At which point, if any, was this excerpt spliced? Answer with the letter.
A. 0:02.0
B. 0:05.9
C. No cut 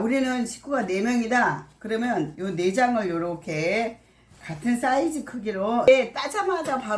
B